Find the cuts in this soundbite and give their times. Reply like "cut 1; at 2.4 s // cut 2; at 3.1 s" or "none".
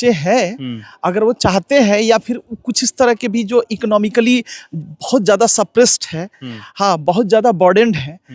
none